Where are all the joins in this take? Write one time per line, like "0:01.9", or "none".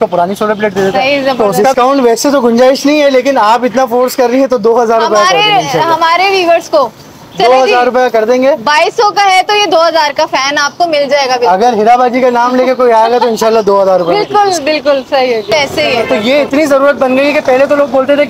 0:01.7
0:15.5